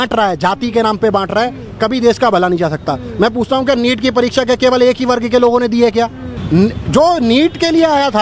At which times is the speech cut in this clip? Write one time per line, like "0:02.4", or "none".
0:06.4